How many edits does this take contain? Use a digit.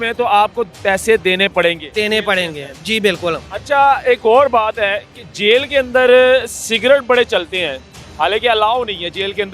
0